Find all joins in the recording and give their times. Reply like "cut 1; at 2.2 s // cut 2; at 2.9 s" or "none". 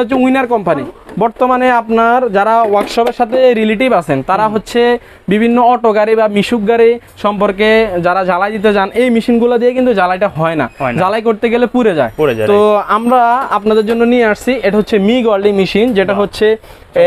cut 1; at 1.0 s

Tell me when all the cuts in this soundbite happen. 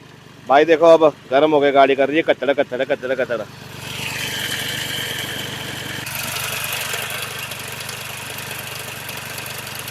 cut 1; at 6.1 s

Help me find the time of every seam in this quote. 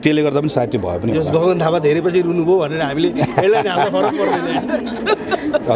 none

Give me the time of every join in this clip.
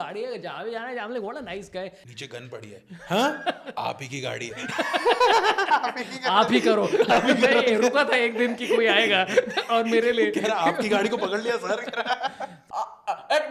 cut 1; at 2.0 s // cut 2; at 12.5 s

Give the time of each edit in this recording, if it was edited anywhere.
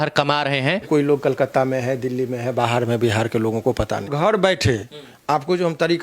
cut 1; at 0.9 s // cut 2; at 4.1 s

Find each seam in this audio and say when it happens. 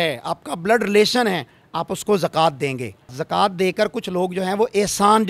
cut 1; at 3.1 s

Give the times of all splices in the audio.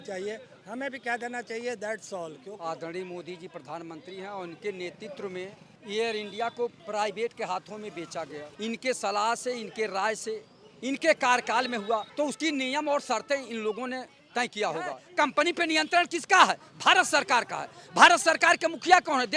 cut 1; at 2.4 s // cut 2; at 5.7 s // cut 3; at 6.8 s // cut 4; at 8.4 s // cut 5; at 12.1 s // cut 6; at 15.0 s

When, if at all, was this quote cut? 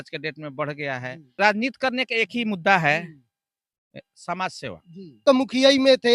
cut 1; at 1.3 s // cut 2; at 5.2 s

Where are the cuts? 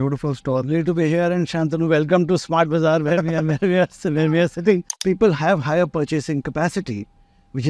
cut 1; at 5.0 s

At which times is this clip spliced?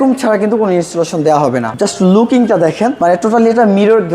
cut 1; at 1.7 s // cut 2; at 3.0 s

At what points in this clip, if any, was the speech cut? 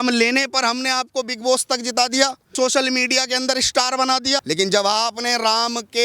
cut 1; at 2.5 s // cut 2; at 4.4 s

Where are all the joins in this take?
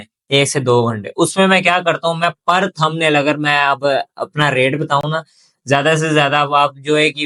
none

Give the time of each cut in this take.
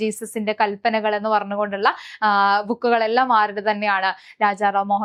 none

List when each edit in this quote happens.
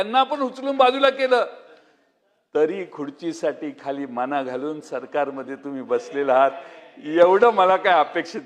none

